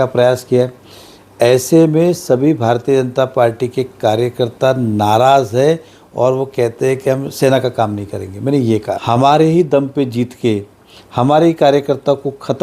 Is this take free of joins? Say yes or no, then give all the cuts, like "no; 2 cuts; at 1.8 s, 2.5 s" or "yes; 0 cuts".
no; 1 cut; at 9.0 s